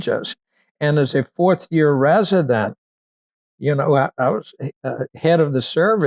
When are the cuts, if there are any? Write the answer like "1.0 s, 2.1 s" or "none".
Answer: none